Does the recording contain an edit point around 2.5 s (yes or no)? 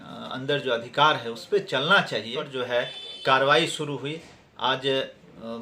yes